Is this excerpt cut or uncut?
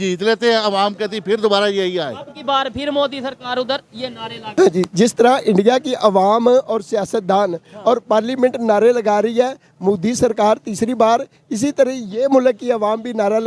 cut